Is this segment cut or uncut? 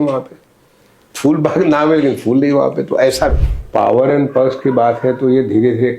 cut